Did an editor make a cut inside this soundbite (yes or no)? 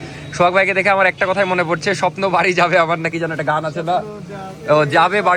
no